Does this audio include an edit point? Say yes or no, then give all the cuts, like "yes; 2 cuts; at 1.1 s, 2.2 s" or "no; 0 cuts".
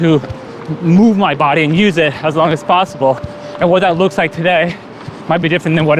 no; 0 cuts